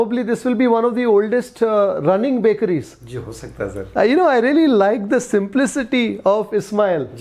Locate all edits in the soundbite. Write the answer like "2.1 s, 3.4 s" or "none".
none